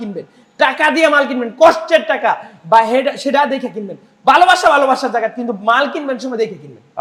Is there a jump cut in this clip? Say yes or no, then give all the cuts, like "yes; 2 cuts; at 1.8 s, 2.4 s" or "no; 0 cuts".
no; 0 cuts